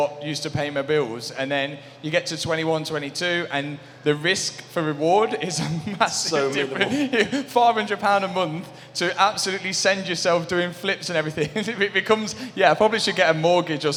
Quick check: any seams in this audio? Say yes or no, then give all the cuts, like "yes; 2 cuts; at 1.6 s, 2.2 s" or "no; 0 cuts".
no; 0 cuts